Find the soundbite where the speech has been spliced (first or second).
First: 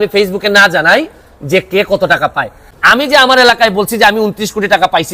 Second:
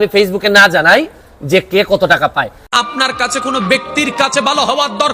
first